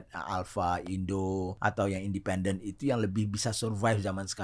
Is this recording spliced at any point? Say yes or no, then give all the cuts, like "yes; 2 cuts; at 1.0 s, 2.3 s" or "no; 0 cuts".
yes; 1 cut; at 1.5 s